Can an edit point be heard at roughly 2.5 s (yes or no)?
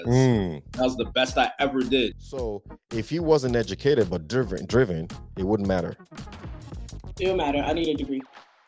yes